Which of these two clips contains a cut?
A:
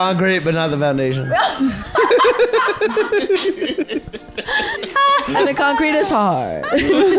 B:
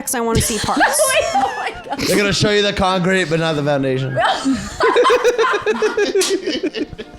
B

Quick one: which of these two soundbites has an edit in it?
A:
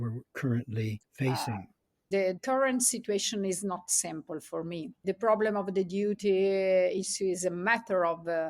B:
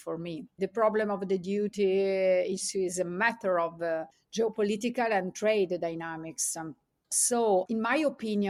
A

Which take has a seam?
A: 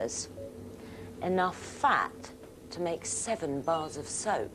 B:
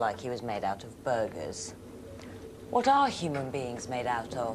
B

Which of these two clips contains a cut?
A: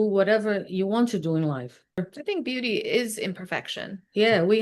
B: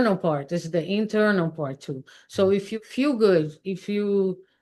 A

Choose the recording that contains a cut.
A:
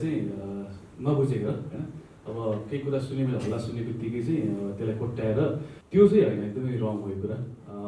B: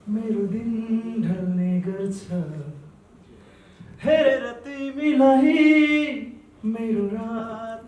A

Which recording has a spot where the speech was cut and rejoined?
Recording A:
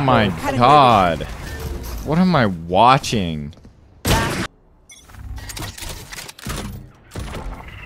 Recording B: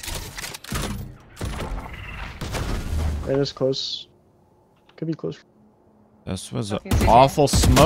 A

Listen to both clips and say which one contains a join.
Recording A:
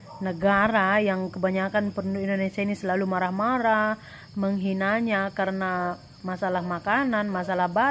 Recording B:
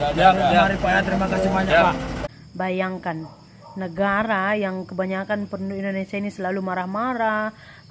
B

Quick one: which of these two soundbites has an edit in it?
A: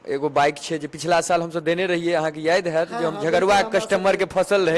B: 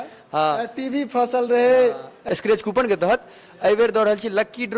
B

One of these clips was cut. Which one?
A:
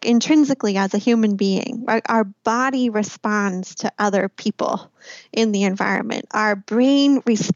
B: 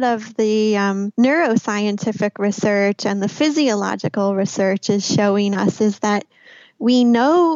B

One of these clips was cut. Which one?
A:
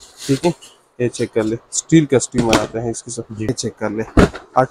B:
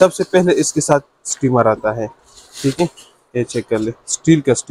A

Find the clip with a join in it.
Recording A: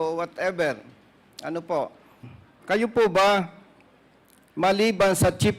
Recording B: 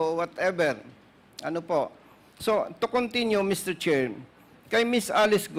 A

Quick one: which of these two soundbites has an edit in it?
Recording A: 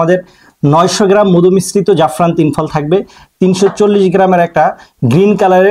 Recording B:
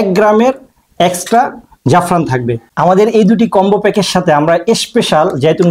B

